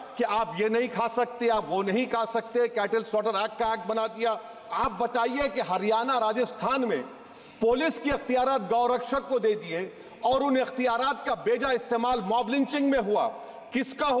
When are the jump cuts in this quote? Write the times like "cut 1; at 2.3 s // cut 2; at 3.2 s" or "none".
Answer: cut 1; at 4.6 s